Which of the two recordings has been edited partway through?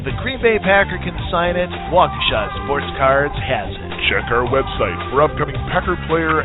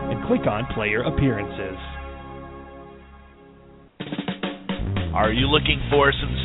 second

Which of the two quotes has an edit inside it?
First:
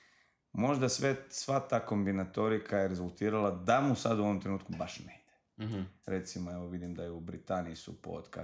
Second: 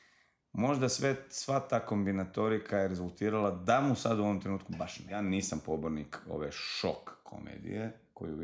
second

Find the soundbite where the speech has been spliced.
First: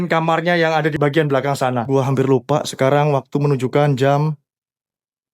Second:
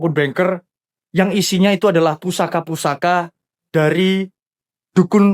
first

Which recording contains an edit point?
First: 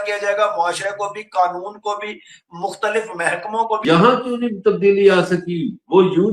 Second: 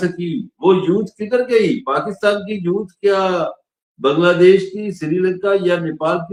first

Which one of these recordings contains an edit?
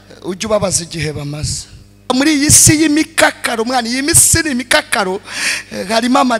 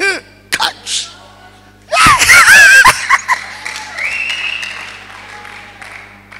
first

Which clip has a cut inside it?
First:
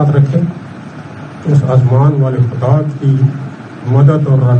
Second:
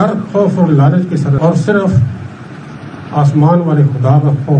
second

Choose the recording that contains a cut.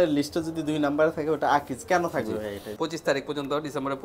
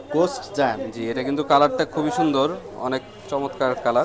first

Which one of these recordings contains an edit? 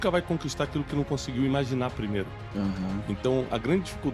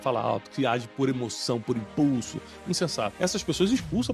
second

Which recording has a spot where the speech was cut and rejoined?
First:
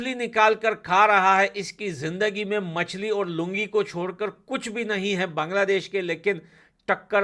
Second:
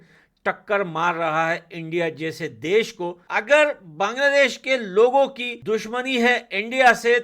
second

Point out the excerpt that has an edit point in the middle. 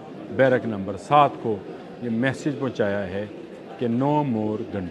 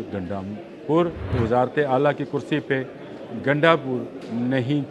second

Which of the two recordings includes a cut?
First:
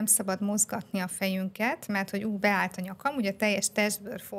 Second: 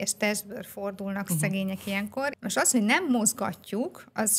second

